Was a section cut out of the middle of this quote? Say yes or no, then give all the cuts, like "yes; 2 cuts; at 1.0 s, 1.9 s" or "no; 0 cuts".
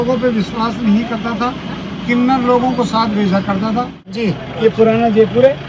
yes; 1 cut; at 4.0 s